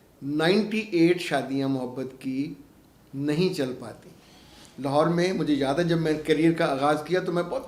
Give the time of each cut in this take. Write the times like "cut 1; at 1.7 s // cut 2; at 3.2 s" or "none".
none